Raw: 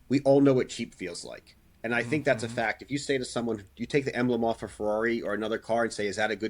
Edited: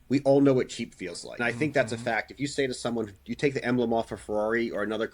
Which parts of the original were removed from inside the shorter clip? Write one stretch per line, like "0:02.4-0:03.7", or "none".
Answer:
0:01.3-0:01.8